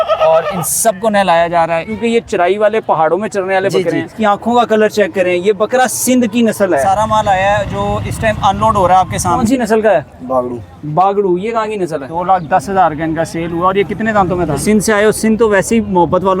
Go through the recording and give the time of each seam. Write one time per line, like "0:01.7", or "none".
0:01.9
0:04.1
0:06.8
0:09.4
0:12.1
0:14.6